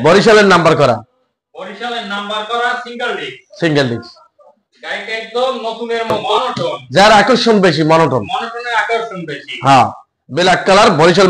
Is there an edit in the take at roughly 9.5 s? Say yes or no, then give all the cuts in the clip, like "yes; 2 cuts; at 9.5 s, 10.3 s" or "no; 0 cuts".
no; 1 cut; at 6.3 s